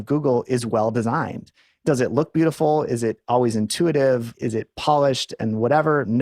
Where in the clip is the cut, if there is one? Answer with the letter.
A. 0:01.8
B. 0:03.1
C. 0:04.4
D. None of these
A